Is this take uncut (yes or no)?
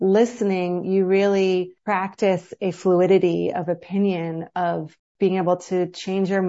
yes